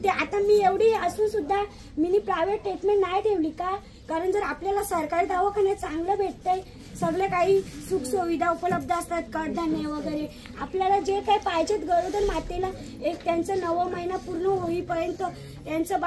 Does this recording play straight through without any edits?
yes; 0 cuts

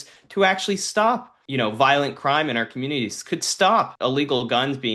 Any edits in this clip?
yes; 2 cuts; at 1.4 s, 3.9 s

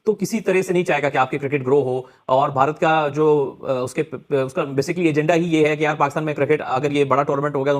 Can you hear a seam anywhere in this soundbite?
no; 0 cuts

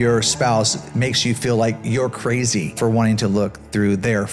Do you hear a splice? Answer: yes; 1 cut; at 2.8 s

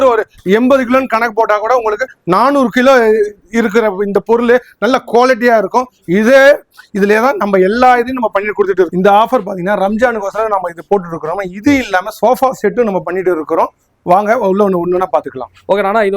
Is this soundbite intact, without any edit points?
yes; 0 cuts

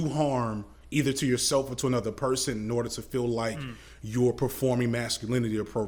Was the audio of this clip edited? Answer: no; 0 cuts

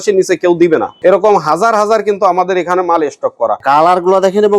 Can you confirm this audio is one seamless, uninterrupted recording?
no; 2 cuts; at 0.9 s, 3.6 s

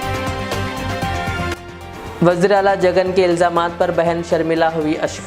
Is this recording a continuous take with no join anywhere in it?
yes; 0 cuts

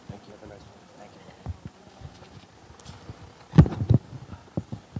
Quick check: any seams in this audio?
yes; 1 cut; at 2.1 s

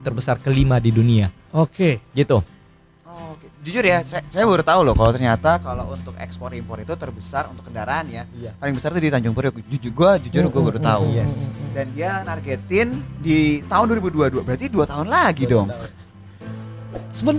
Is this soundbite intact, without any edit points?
yes; 0 cuts

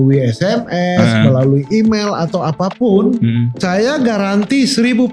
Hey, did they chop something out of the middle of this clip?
yes; 1 cut; at 3.5 s

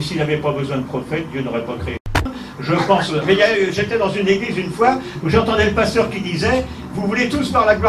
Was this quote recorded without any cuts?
no; 1 cut; at 2.3 s

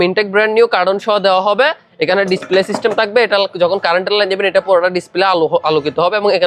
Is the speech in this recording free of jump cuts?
yes; 0 cuts

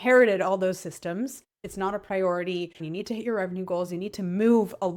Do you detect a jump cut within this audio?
yes; 2 cuts; at 1.6 s, 2.8 s

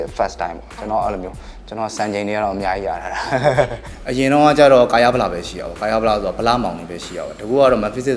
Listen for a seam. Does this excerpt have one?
yes; 1 cut; at 3.9 s

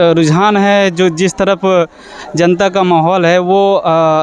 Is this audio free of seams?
yes; 0 cuts

